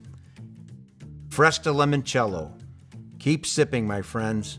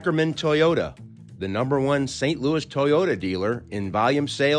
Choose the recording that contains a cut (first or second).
first